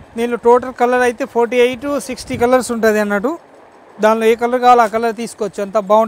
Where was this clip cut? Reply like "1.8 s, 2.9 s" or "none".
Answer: none